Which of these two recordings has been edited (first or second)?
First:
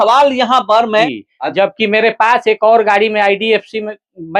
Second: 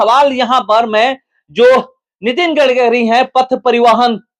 first